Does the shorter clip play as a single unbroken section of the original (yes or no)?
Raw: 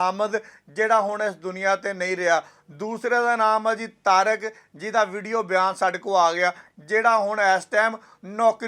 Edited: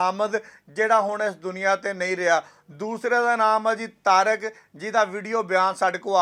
yes